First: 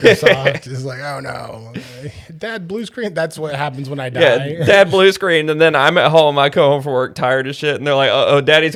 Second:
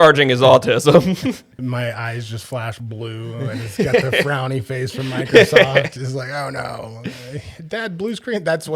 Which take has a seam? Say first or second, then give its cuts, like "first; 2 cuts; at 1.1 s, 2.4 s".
second; 1 cut; at 1.6 s